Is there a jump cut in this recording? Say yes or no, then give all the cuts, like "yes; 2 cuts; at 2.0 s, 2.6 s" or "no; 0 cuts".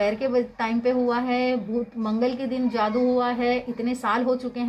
no; 0 cuts